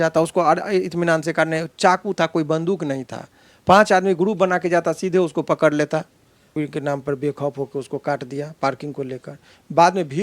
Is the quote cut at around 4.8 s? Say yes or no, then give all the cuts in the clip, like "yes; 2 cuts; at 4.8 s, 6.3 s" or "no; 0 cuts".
no; 1 cut; at 6.5 s